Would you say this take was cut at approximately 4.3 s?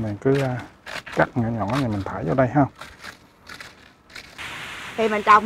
yes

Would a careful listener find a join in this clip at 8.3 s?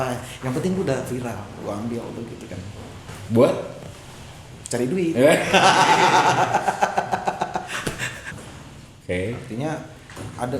yes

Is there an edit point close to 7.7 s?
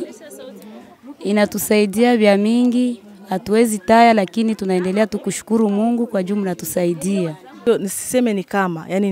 yes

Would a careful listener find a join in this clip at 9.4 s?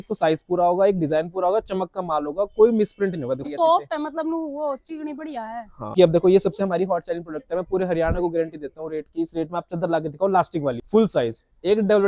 no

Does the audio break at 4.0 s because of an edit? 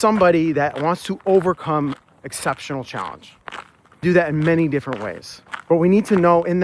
yes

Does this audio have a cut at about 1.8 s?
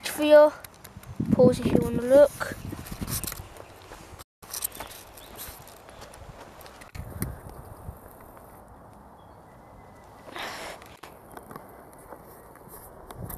no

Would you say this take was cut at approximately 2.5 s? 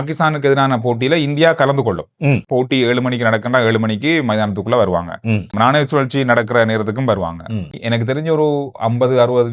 yes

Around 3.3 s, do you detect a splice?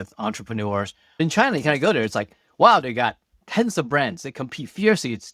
no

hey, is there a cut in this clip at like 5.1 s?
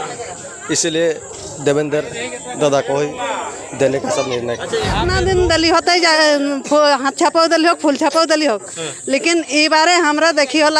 yes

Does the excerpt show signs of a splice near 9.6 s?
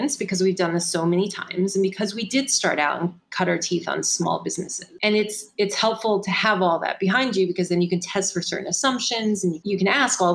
yes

